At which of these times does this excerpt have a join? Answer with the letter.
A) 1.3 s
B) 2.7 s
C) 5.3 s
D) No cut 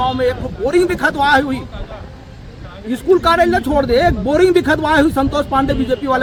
D